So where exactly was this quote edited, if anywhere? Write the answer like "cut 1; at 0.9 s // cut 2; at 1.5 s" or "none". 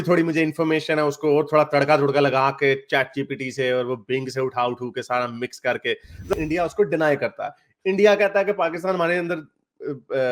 cut 1; at 6.3 s

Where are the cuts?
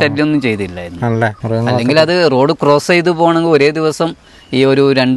cut 1; at 1.4 s

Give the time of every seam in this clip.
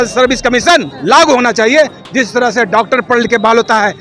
cut 1; at 0.9 s

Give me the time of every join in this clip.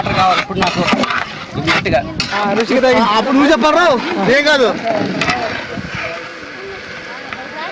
cut 1; at 2.5 s

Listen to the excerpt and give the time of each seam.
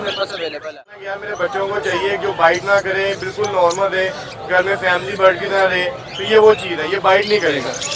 cut 1; at 1.1 s

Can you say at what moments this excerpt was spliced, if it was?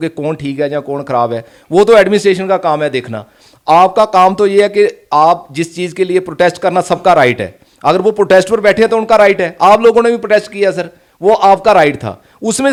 none

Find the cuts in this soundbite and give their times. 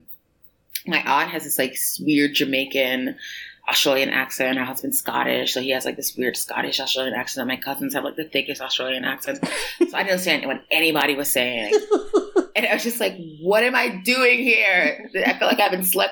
none

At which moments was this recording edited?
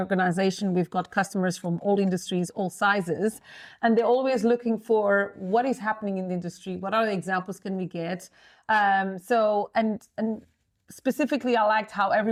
none

